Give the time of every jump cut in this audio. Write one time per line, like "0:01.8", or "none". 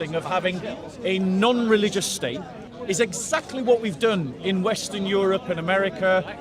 0:02.6